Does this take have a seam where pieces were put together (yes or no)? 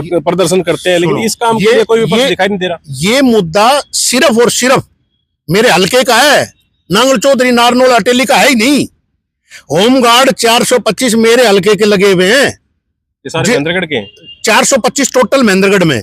no